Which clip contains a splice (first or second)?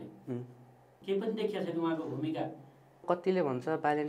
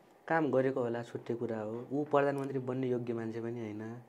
first